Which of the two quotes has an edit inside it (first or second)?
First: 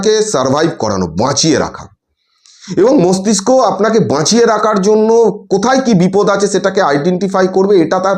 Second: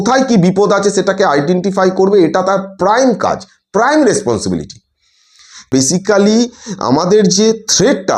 second